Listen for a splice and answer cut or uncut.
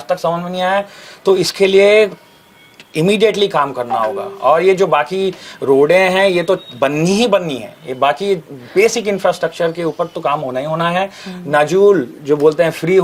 uncut